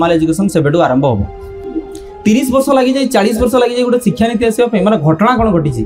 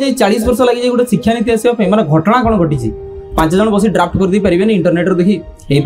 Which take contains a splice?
first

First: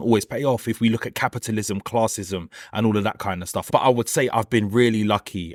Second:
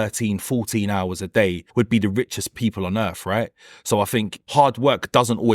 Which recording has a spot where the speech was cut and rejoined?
second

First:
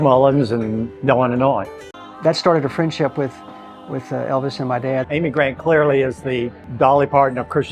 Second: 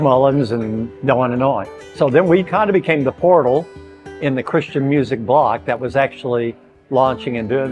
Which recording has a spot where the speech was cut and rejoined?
first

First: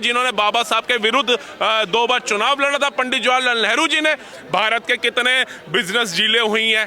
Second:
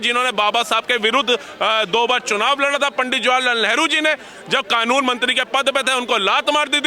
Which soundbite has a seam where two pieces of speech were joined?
first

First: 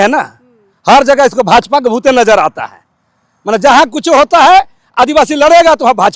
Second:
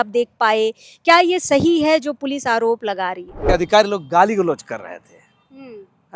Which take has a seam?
second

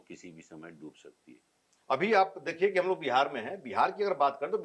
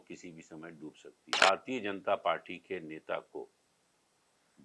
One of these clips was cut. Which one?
second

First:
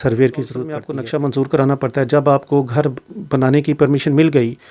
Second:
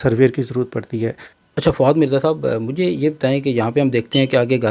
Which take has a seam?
first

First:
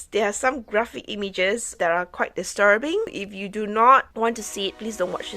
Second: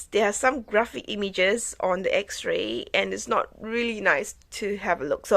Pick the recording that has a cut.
first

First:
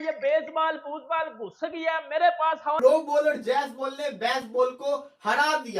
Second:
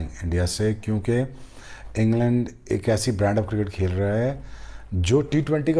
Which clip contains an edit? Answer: first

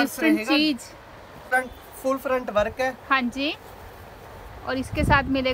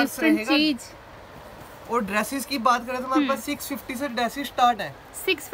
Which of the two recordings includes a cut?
first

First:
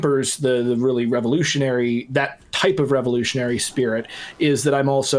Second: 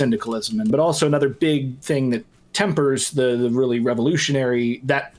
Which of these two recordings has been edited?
second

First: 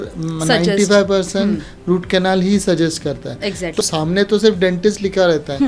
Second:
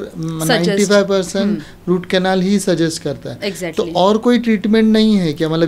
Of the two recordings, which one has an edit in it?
first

